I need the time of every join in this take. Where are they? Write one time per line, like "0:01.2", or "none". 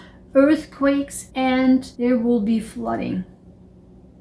0:01.2
0:01.9